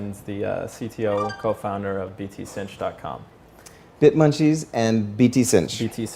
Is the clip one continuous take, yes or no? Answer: yes